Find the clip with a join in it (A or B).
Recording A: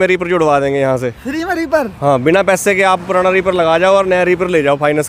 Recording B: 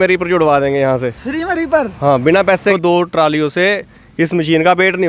B